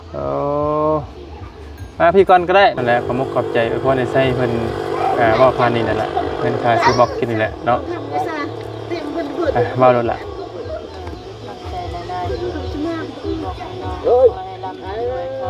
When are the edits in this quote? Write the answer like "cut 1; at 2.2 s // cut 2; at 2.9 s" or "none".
cut 1; at 2.8 s